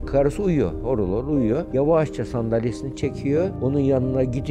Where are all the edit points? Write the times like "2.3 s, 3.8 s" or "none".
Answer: 1.7 s